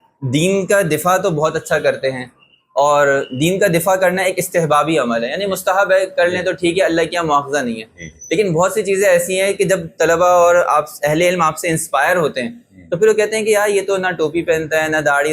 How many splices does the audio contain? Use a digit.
0